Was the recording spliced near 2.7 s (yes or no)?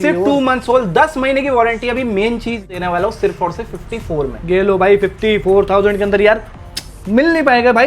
yes